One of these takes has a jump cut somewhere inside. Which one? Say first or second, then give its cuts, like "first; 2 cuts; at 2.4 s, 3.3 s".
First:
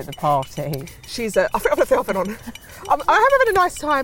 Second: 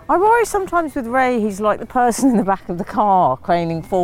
second; 1 cut; at 1.8 s